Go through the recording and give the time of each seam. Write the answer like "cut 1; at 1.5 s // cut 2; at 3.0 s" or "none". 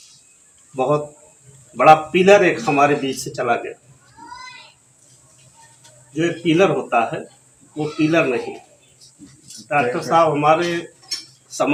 none